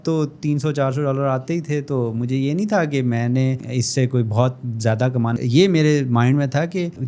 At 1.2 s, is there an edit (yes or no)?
no